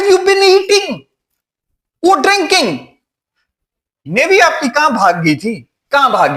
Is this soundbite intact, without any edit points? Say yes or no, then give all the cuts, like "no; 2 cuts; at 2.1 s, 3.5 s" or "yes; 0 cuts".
no; 1 cut; at 4.0 s